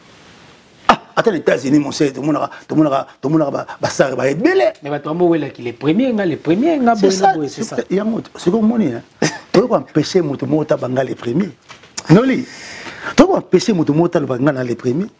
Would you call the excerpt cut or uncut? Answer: uncut